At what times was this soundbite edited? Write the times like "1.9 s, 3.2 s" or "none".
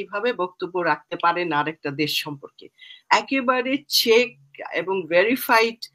none